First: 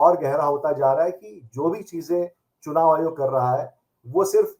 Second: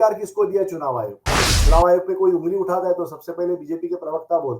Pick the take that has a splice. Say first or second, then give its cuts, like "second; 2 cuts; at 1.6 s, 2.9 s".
second; 1 cut; at 1.5 s